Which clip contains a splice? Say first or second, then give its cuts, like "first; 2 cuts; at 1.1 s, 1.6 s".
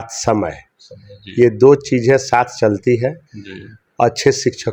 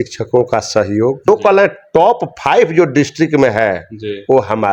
second; 1 cut; at 1.3 s